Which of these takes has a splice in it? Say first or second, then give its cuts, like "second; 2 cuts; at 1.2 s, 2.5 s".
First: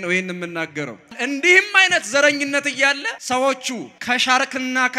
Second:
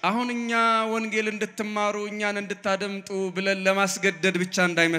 first; 3 cuts; at 1.2 s, 3.1 s, 3.9 s